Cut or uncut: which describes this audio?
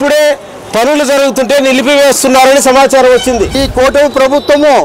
cut